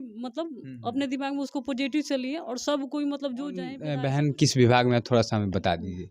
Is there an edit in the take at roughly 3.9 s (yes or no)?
yes